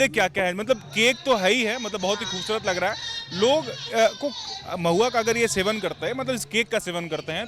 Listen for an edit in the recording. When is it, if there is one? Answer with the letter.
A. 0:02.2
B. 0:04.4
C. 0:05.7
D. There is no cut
D